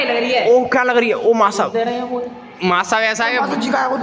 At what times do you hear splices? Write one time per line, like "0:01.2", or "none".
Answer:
none